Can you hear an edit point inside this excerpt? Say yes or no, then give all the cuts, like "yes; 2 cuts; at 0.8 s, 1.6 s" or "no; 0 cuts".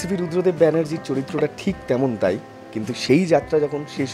no; 0 cuts